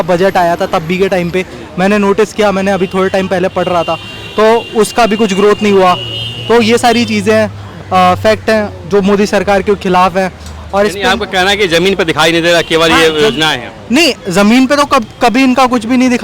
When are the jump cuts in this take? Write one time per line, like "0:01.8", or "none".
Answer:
none